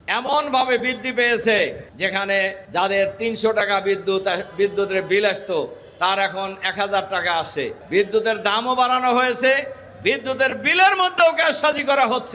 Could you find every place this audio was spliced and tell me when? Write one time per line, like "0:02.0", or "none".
none